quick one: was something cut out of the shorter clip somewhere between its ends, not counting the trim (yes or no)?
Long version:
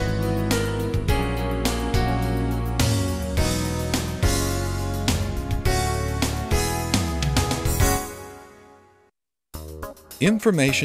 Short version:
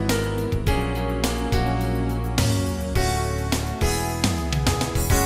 yes